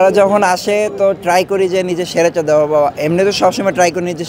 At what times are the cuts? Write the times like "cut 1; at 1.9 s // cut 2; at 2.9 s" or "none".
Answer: none